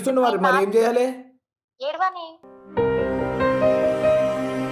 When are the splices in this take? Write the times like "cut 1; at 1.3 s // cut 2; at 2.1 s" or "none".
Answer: none